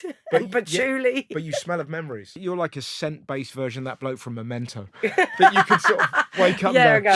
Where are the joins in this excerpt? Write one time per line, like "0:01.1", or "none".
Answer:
0:02.4